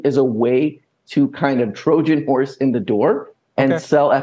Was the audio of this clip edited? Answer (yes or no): no